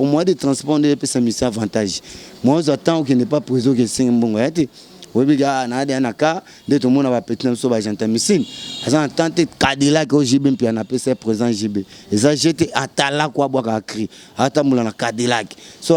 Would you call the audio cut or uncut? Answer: uncut